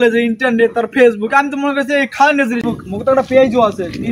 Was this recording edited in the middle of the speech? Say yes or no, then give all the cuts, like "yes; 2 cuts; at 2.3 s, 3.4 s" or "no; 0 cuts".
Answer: yes; 1 cut; at 2.6 s